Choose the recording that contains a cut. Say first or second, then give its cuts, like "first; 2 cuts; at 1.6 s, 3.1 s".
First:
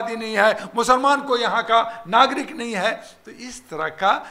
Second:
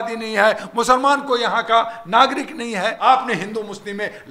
second; 1 cut; at 3.0 s